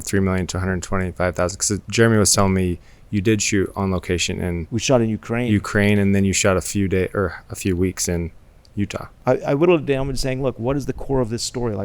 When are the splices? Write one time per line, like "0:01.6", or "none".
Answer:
0:04.6
0:09.1